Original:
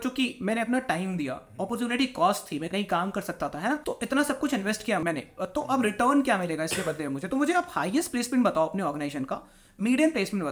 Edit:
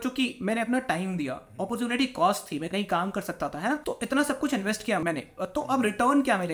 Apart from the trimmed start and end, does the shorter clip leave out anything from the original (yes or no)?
no